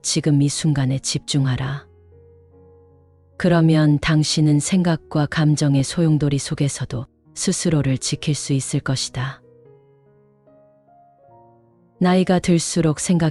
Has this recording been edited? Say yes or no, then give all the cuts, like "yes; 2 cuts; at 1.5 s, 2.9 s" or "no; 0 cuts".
yes; 2 cuts; at 9.4 s, 11.9 s